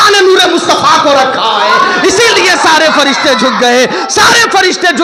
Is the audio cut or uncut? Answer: uncut